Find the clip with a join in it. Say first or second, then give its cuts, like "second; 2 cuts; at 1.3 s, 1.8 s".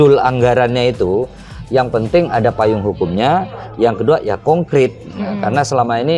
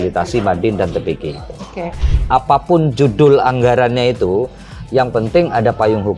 second; 1 cut; at 2.1 s